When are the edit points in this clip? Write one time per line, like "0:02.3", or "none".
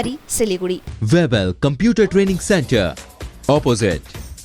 0:00.9